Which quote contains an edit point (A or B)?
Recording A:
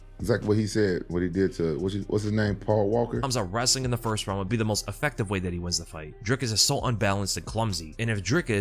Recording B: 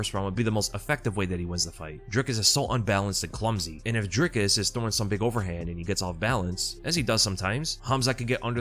A